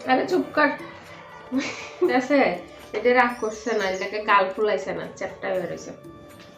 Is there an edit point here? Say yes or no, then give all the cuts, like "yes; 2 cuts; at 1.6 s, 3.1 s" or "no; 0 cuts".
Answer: yes; 1 cut; at 2.1 s